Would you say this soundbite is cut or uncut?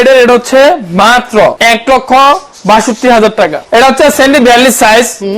cut